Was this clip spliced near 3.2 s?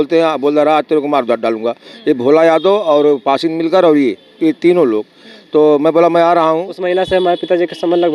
no; 1 cut; at 6.8 s

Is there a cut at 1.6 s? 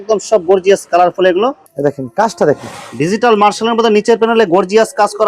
yes; 1 cut; at 1.6 s

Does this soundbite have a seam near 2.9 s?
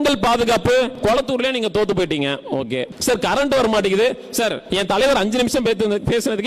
yes; 3 cuts; at 0.9 s, 2.9 s, 4.6 s

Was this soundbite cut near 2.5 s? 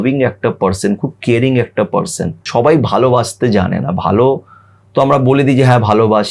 yes; 1 cut; at 2.5 s

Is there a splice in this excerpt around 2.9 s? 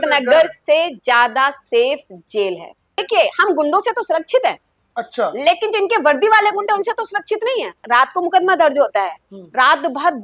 yes; 2 cuts; at 2.9 s, 7.8 s

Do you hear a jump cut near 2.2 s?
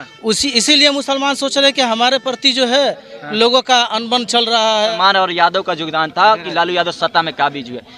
no; 1 cut; at 4.9 s

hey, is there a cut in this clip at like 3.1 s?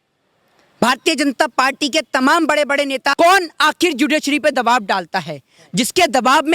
yes; 1 cut; at 3.1 s

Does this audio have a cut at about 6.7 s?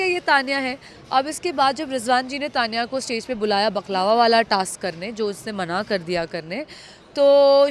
no; 0 cuts

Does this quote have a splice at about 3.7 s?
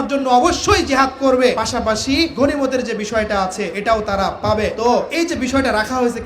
yes; 3 cuts; at 2.1 s, 3.7 s, 5.0 s

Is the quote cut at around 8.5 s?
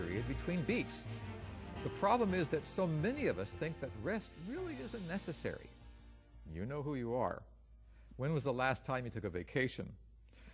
yes; 1 cut; at 8.5 s

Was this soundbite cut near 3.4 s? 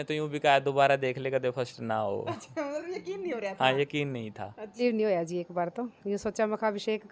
no; 1 cut; at 4.8 s

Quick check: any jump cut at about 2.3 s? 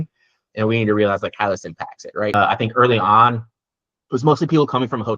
yes; 1 cut; at 2.3 s

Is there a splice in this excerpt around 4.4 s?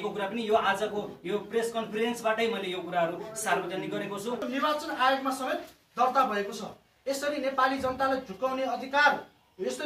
yes; 1 cut; at 4.4 s

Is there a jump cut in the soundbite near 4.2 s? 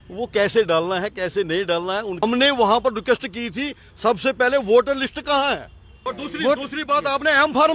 no; 2 cuts; at 2.1 s, 6.1 s

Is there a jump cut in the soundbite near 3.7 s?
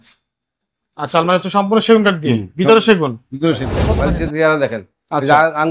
yes; 1 cut; at 3.7 s

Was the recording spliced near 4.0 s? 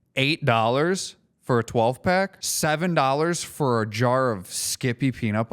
no; 1 cut; at 2.4 s

